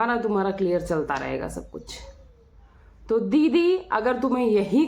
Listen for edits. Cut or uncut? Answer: uncut